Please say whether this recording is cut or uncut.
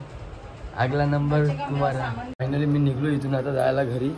uncut